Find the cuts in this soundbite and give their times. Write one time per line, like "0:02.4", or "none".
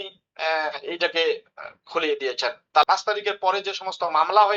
0:02.8